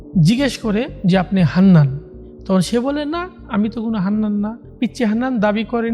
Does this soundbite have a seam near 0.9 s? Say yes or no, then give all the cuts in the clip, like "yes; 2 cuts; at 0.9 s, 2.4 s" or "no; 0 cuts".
yes; 3 cuts; at 0.9 s, 3.4 s, 4.6 s